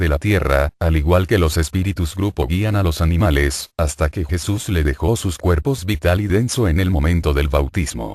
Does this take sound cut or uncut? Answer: uncut